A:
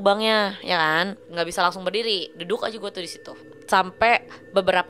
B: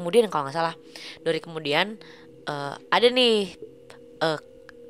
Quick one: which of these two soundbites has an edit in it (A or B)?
A